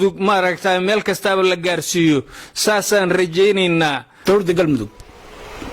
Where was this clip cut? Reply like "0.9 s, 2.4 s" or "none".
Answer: 4.1 s